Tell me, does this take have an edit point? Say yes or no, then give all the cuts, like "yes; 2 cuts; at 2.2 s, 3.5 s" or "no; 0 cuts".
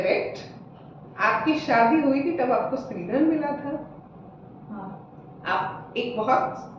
no; 0 cuts